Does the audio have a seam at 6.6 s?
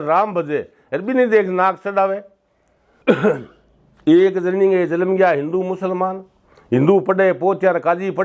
no; 1 cut; at 2.9 s

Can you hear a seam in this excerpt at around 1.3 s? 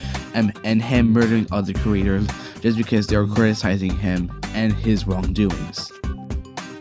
no; 1 cut; at 3.8 s

